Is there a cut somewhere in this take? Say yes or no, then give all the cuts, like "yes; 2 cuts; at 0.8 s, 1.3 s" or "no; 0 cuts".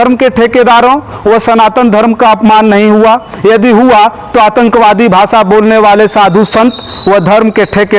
no; 0 cuts